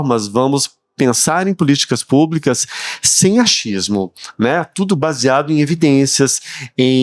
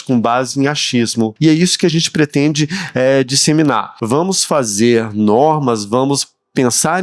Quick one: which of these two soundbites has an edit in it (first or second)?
second